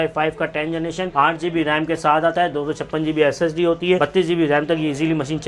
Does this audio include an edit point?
yes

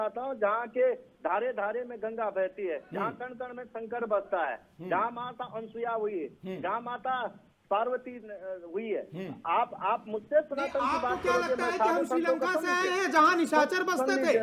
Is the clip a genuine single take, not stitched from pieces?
yes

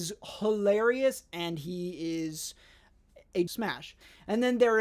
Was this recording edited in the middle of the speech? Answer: yes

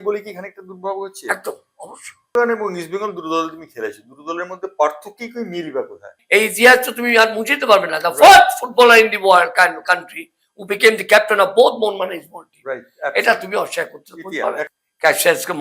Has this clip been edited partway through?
yes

